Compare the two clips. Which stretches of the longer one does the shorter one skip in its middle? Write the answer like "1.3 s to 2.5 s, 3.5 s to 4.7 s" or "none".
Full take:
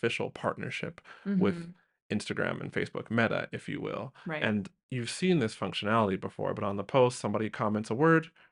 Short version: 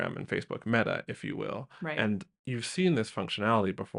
none